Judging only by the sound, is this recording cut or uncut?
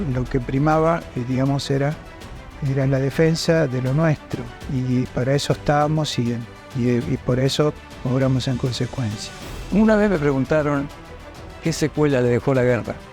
uncut